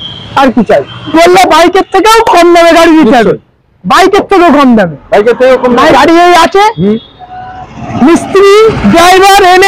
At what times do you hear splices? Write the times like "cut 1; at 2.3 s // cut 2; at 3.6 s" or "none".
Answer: cut 1; at 1.1 s // cut 2; at 5.9 s